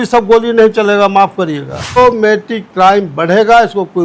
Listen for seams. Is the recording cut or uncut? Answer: cut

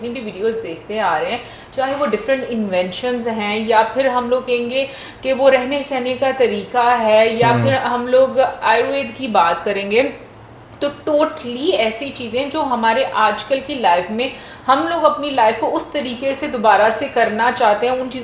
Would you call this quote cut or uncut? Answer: uncut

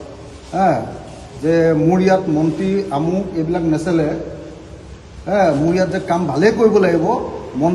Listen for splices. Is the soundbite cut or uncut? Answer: uncut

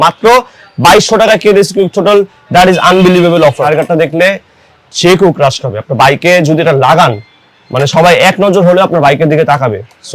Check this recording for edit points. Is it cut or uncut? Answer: cut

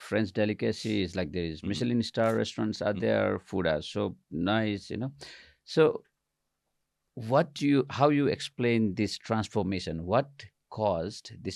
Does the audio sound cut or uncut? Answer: uncut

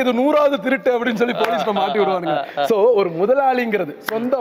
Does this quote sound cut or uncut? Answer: uncut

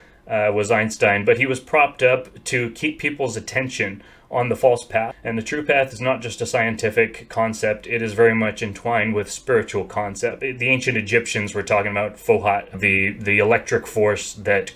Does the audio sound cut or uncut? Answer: cut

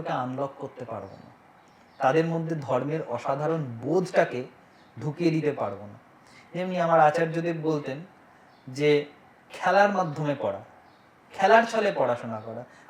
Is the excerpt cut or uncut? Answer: uncut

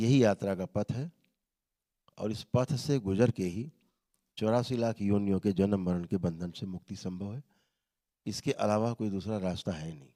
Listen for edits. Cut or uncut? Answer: uncut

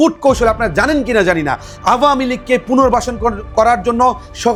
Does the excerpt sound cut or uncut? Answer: uncut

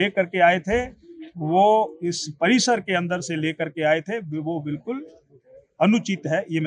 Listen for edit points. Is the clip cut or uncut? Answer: uncut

